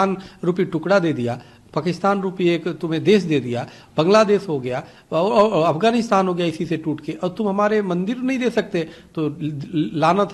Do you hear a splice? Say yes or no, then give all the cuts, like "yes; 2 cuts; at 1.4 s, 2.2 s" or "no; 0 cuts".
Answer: no; 0 cuts